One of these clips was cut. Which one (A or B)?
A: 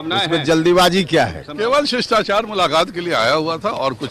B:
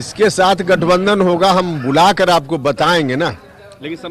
A